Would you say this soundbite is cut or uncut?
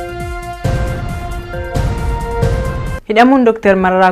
cut